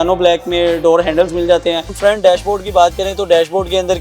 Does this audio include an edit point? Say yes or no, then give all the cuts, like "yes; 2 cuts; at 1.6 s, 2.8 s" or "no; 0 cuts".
yes; 1 cut; at 2.0 s